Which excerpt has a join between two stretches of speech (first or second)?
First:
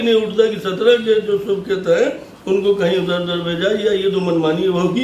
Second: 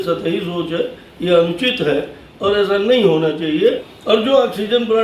second